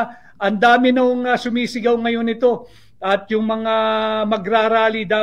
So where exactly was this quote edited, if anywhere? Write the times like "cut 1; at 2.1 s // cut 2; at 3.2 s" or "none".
cut 1; at 3.0 s